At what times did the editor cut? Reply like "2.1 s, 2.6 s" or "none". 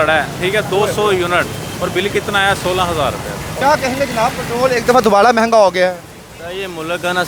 none